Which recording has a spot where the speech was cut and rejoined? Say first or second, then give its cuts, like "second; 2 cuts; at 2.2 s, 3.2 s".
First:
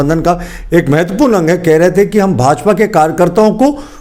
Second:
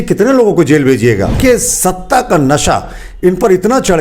second; 1 cut; at 1.4 s